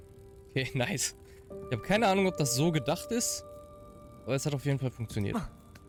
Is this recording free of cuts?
yes; 0 cuts

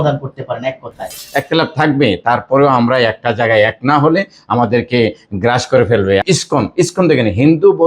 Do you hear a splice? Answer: yes; 2 cuts; at 1.0 s, 6.2 s

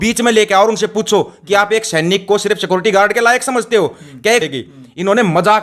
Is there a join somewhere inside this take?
yes; 1 cut; at 4.4 s

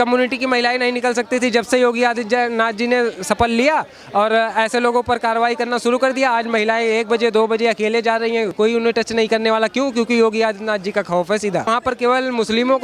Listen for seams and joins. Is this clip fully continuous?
no; 2 cuts; at 8.5 s, 11.7 s

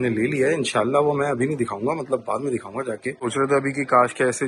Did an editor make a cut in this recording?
yes; 1 cut; at 3.2 s

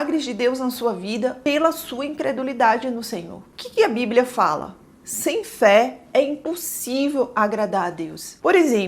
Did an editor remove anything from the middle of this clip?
no; 0 cuts

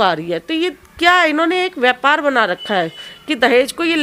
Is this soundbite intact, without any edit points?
yes; 0 cuts

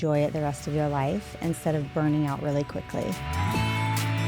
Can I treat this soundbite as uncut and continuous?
no; 1 cut; at 3.2 s

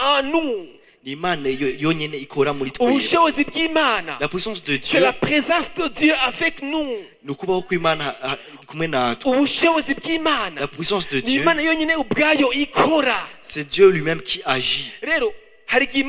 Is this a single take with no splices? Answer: yes; 0 cuts

